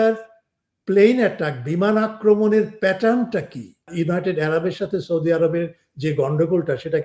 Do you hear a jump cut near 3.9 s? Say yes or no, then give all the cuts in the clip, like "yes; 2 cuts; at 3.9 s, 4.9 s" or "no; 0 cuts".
yes; 1 cut; at 3.9 s